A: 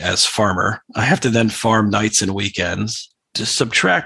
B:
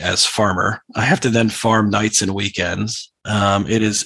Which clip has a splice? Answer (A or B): A